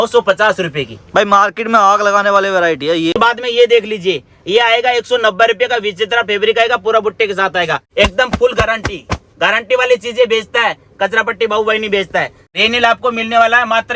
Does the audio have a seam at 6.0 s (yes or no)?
no